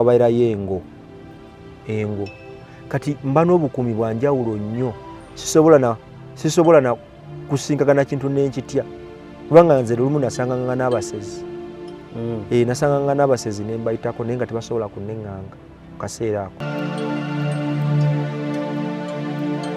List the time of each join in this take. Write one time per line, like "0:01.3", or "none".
0:16.5